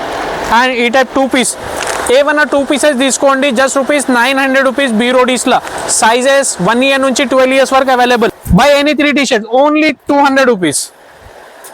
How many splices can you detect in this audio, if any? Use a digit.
1